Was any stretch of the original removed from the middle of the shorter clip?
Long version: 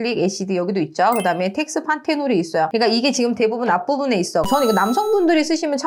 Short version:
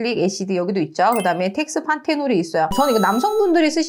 yes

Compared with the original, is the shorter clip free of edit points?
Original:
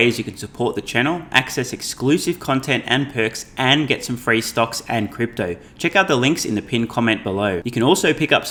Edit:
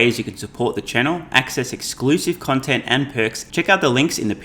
no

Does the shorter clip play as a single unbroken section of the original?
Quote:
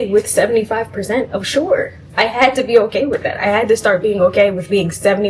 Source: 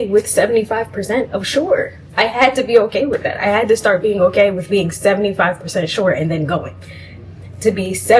yes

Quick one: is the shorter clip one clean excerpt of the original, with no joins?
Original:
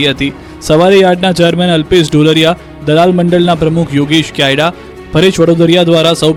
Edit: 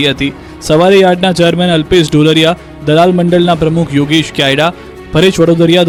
yes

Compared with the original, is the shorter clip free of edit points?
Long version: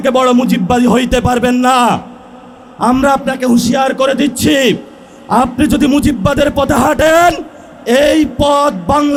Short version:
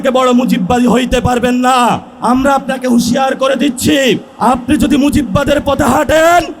no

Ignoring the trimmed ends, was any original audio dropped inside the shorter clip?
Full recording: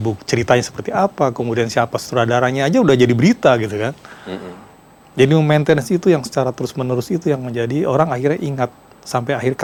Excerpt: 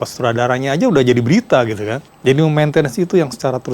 yes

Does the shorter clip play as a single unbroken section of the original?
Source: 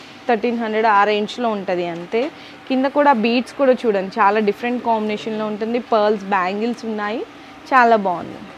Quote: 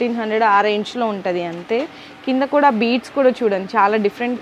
yes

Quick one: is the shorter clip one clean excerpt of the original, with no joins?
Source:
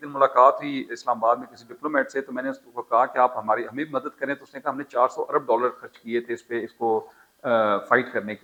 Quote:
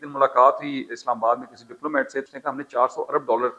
no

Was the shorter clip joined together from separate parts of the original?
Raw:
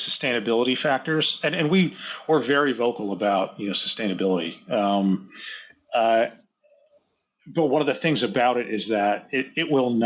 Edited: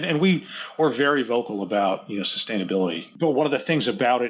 yes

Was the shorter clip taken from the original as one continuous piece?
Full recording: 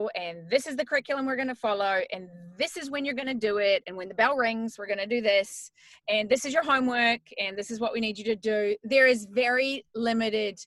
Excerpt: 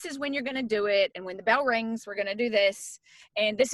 yes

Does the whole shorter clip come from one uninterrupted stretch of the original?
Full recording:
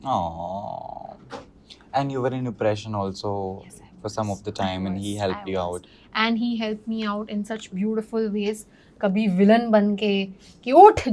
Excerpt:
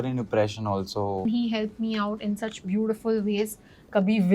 no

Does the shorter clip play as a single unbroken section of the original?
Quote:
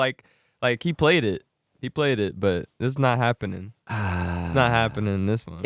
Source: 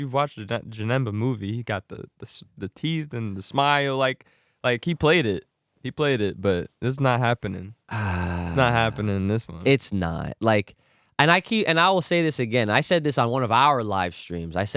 yes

